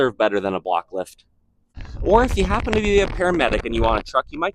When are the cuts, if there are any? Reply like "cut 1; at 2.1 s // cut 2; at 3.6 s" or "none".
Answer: cut 1; at 1.8 s